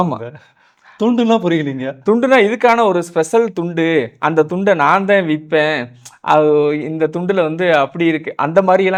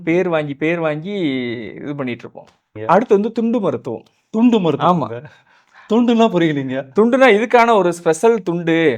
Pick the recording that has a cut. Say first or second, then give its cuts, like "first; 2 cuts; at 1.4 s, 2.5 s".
second; 1 cut; at 2.7 s